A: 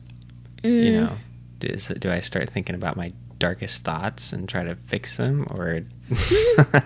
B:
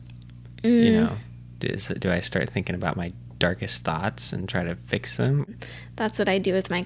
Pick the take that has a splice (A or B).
B